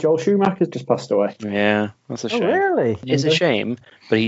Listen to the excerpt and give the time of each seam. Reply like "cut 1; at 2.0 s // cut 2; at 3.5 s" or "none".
cut 1; at 3.0 s